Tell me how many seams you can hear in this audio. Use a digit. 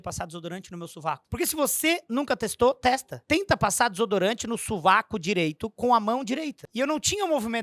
3